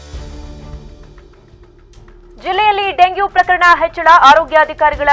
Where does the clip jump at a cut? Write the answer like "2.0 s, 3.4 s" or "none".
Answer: 1.3 s